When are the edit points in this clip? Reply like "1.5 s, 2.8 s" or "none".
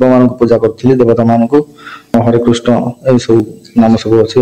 2.1 s